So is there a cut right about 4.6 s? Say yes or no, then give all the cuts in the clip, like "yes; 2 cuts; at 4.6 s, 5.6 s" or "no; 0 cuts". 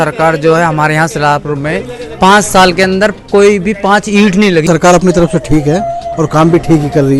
yes; 1 cut; at 4.6 s